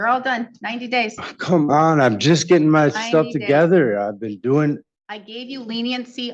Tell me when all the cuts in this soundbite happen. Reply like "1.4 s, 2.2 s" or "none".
none